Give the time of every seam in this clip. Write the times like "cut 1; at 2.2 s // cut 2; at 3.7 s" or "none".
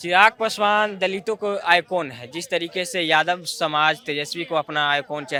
none